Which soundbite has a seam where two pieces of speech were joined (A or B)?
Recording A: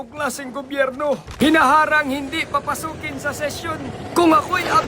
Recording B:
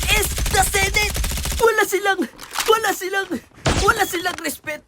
A